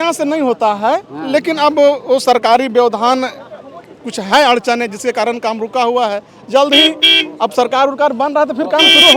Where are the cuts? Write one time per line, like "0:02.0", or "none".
none